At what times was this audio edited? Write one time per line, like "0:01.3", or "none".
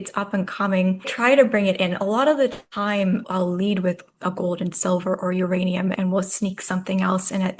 0:01.1
0:03.3
0:05.9